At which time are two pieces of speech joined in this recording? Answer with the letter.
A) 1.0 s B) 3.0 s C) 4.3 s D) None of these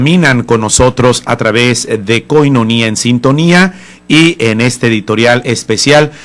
B